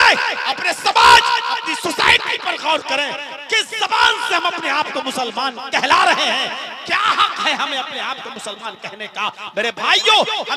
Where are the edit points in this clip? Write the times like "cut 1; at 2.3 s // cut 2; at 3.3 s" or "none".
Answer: none

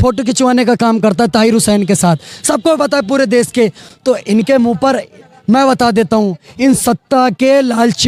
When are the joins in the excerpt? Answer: none

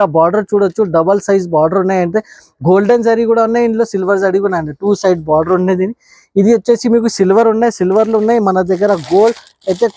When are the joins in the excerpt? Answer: none

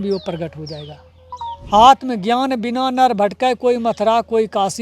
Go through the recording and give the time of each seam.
cut 1; at 1.3 s

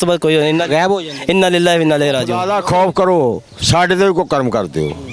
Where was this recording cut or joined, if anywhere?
cut 1; at 2.4 s

